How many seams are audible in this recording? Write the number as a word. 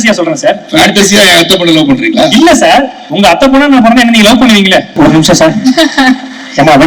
one